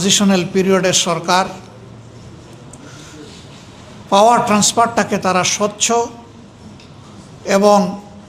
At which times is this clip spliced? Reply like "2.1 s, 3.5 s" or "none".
none

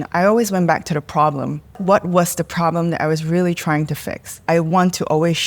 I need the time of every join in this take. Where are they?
1.8 s, 4.4 s

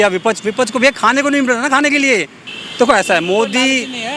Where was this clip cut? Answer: none

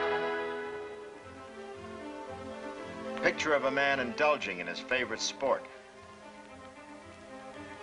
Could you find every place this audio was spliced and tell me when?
1.9 s

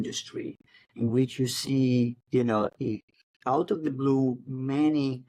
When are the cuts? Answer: none

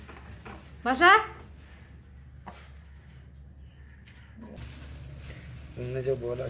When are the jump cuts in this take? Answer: 4.6 s

